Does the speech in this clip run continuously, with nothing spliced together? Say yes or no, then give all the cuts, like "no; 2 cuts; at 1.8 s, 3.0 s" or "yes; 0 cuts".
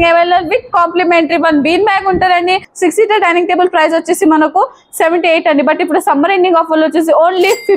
no; 1 cut; at 2.7 s